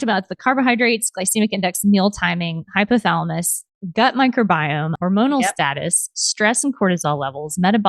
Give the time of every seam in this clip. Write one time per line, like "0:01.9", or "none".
0:04.9